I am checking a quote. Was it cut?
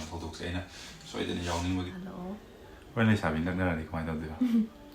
yes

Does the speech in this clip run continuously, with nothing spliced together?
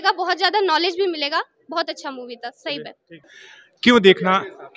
yes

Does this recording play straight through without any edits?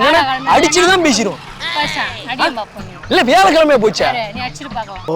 yes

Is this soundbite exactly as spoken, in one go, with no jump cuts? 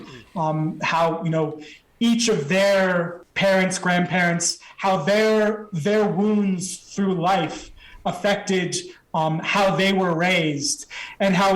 no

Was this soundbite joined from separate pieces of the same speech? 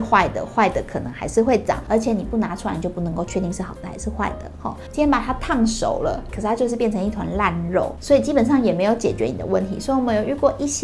yes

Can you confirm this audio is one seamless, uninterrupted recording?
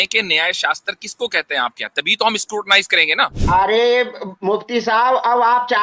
no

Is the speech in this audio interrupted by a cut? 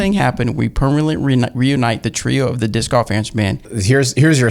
yes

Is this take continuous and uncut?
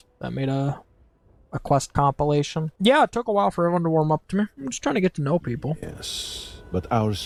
yes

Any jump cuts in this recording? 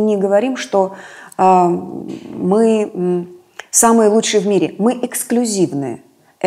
no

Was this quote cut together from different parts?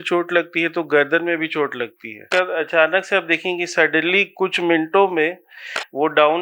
yes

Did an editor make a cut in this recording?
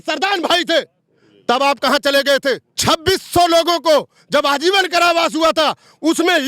yes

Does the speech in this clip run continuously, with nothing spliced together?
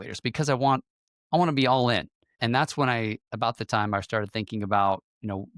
no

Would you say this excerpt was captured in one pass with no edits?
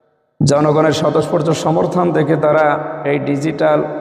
yes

